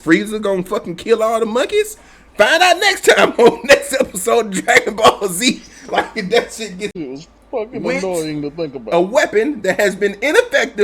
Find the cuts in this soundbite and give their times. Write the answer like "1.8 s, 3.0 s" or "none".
6.9 s